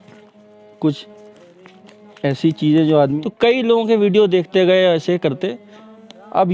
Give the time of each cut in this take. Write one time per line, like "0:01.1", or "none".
0:03.2

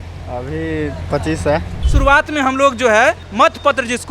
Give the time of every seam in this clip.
0:01.8
0:03.2

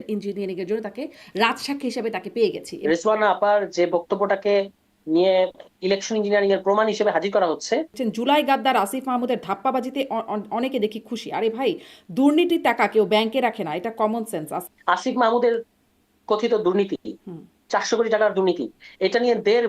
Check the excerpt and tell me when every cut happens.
0:02.7
0:08.0
0:14.6

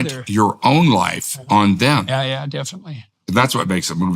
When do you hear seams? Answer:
0:03.1

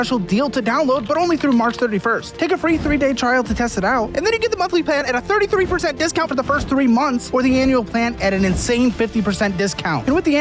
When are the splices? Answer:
none

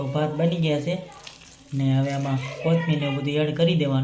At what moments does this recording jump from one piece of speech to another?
none

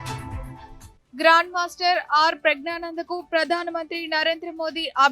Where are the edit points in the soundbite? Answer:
0:00.9

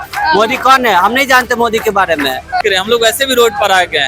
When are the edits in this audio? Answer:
0:02.6

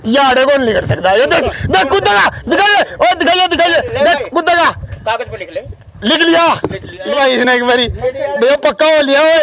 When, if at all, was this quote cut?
0:07.1

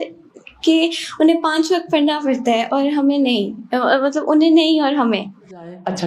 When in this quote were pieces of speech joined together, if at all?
none

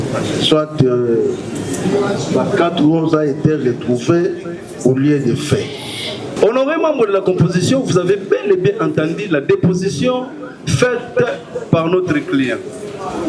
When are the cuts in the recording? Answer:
0:06.3

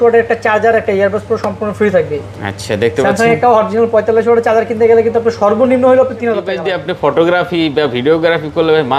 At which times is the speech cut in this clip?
0:06.6

